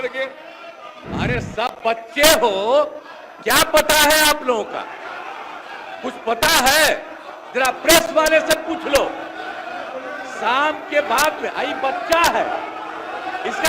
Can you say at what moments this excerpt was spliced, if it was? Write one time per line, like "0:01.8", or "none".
0:00.9